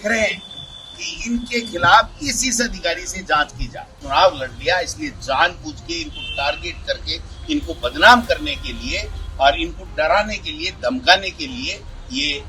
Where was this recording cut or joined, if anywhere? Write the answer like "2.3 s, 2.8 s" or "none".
3.9 s